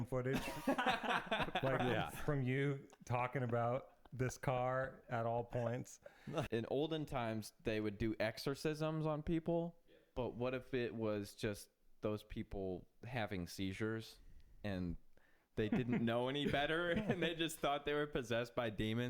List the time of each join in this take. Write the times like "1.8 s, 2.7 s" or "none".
6.5 s